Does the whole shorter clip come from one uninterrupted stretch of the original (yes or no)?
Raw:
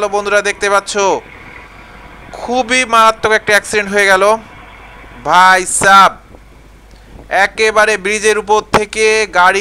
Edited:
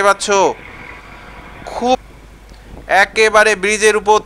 no